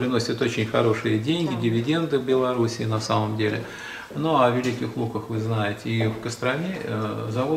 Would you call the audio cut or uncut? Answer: uncut